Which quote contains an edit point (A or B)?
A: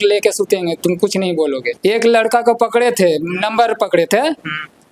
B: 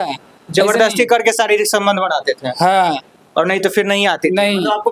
A